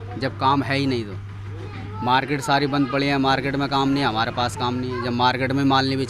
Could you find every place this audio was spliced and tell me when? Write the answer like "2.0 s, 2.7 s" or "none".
none